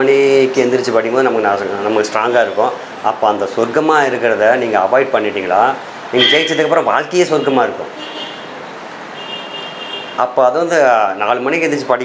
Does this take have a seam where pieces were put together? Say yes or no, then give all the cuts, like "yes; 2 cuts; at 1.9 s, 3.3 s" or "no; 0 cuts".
no; 0 cuts